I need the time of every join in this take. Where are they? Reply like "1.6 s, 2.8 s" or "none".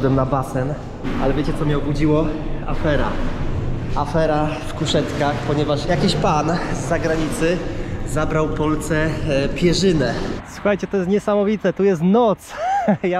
1.1 s, 10.4 s